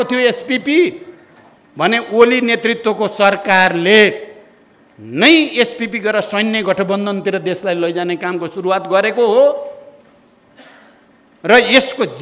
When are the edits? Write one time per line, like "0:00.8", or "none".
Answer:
none